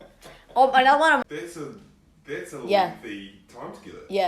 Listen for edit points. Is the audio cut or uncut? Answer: cut